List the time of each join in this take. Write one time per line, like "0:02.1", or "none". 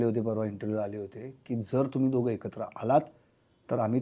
none